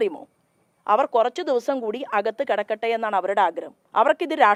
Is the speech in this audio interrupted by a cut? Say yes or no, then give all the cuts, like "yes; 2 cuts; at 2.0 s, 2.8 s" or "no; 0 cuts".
no; 0 cuts